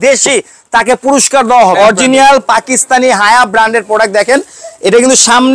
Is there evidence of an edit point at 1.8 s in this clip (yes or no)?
yes